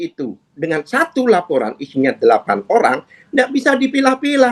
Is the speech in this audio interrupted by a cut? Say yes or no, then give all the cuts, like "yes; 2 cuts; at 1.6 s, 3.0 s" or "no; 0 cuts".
no; 0 cuts